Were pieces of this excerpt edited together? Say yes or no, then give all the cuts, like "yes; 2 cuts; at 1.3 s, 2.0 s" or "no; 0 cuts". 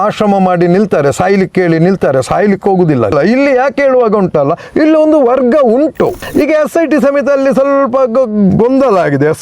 yes; 2 cuts; at 3.1 s, 6.2 s